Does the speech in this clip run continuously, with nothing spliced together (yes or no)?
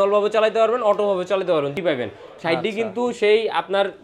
no